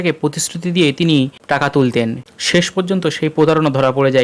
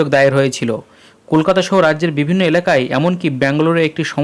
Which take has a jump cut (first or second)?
first